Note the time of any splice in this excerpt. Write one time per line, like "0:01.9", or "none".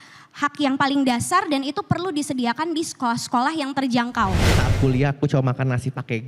0:04.5